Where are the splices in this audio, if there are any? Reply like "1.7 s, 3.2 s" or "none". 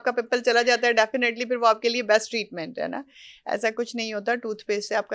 none